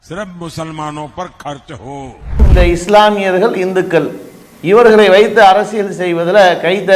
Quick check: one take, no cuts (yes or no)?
no